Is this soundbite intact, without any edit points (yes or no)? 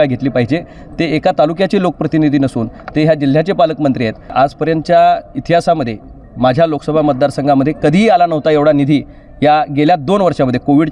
no